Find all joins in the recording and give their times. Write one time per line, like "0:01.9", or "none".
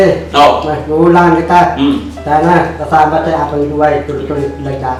none